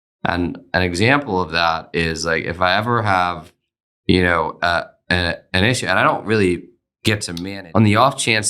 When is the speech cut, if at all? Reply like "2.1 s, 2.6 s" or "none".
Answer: 7.3 s